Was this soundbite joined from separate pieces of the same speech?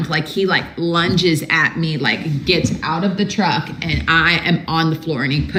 no; 0 cuts

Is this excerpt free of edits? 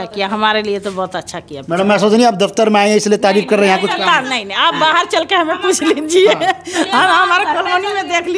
yes; 0 cuts

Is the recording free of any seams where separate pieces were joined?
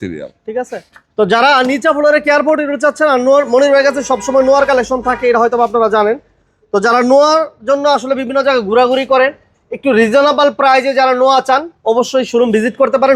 yes; 0 cuts

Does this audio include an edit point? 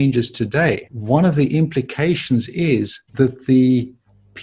yes; 2 cuts; at 0.9 s, 3.0 s

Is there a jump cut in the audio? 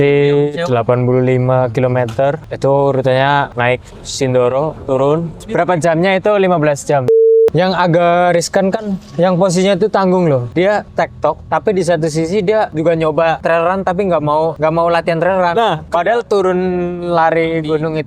yes; 9 cuts; at 2.5 s, 3.5 s, 5.4 s, 7.2 s, 10.8 s, 12.7 s, 13.4 s, 14.5 s, 15.9 s

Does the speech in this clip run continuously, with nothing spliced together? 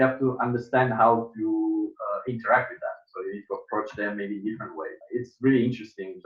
no; 1 cut; at 5.0 s

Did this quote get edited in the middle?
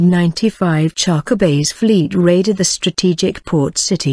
no; 0 cuts

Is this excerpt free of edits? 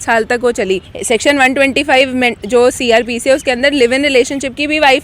no; 1 cut; at 0.9 s

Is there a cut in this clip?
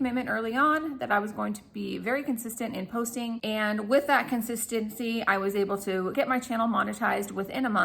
yes; 2 cuts; at 3.5 s, 6.1 s

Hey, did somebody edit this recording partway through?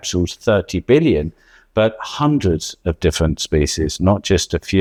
no; 0 cuts

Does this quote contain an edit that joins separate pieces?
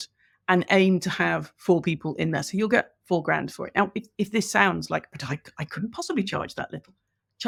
no; 0 cuts

